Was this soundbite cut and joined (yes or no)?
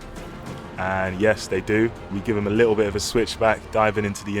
yes